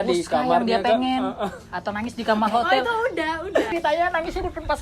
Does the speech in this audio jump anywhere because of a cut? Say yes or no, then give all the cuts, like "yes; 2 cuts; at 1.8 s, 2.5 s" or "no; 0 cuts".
no; 0 cuts